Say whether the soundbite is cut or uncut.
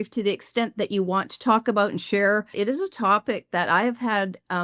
cut